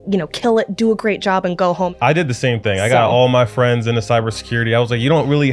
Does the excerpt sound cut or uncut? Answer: cut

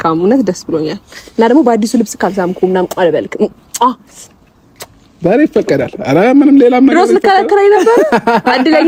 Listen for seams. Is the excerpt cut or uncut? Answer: uncut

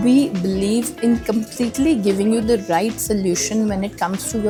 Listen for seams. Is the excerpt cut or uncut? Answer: uncut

